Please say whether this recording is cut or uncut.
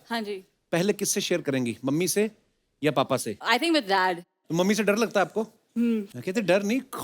cut